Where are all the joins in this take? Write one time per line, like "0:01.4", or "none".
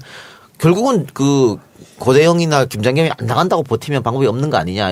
none